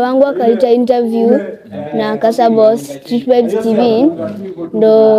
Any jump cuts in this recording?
no; 0 cuts

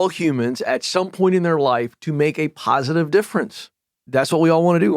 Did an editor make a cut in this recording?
yes; 1 cut; at 4.0 s

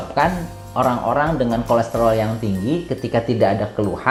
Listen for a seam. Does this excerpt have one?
no; 0 cuts

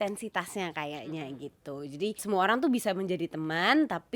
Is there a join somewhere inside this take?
yes; 1 cut; at 2.2 s

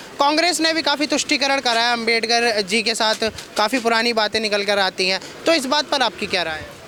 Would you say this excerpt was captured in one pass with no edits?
yes; 0 cuts

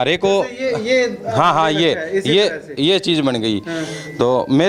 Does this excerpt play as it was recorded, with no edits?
yes; 0 cuts

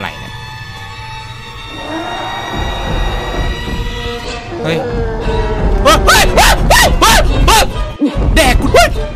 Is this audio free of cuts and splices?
no; 1 cut; at 8.2 s

